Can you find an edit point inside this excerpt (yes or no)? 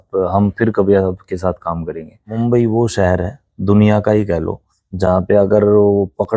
yes